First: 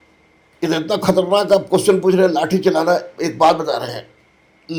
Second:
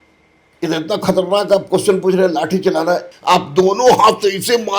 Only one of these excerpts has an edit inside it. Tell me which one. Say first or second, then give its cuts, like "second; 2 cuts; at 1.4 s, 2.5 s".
second; 1 cut; at 3.1 s